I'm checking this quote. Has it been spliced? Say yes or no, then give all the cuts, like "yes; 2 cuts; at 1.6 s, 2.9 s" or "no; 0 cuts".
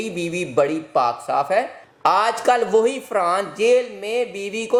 no; 0 cuts